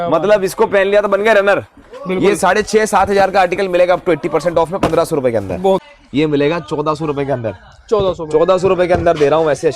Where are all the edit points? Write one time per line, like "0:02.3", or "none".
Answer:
0:06.0

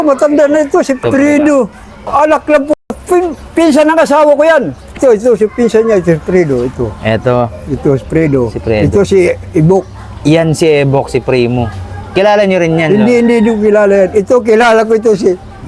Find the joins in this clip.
none

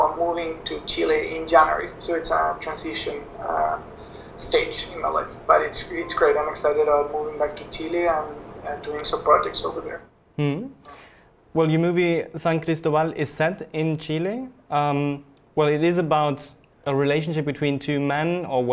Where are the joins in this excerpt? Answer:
0:04.6

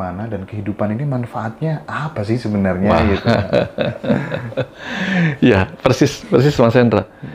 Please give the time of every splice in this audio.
none

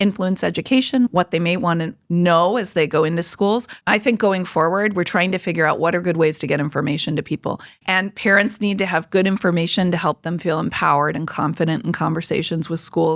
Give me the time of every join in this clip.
0:01.1
0:03.8
0:07.7

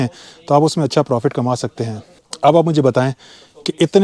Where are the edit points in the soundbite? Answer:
none

